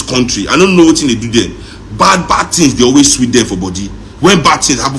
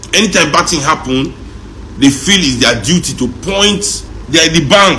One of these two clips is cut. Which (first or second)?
second